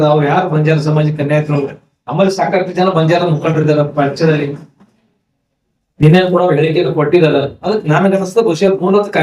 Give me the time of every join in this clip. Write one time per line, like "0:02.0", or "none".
0:05.8